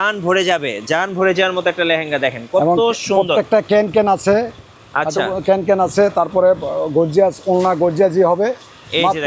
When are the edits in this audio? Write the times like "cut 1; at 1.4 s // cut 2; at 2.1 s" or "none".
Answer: none